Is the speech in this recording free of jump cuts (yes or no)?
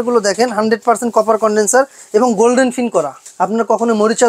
no